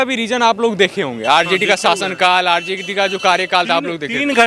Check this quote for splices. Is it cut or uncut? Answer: uncut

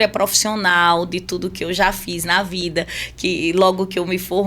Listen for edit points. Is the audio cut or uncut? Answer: uncut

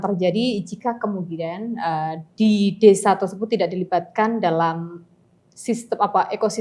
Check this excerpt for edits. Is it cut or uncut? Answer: uncut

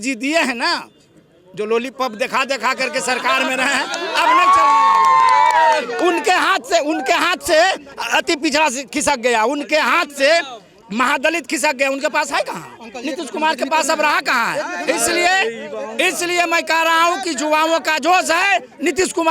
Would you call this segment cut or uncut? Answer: uncut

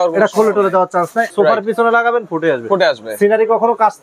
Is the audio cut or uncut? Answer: cut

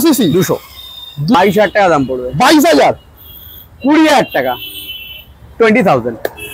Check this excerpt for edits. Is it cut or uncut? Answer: cut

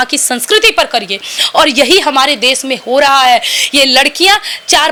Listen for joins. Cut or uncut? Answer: uncut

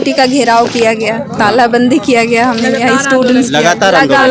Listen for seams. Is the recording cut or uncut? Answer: uncut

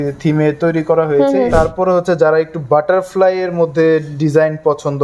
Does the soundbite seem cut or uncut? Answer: cut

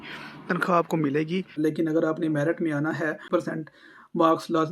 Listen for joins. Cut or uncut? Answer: cut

